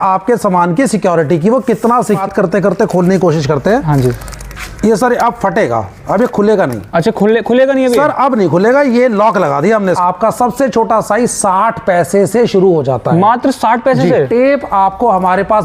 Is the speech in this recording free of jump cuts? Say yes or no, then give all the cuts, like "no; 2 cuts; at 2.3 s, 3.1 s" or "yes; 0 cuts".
no; 3 cuts; at 2.2 s, 10.0 s, 14.3 s